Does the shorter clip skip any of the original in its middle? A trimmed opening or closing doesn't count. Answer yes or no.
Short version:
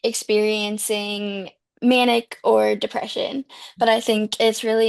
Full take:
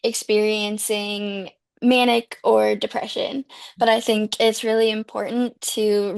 no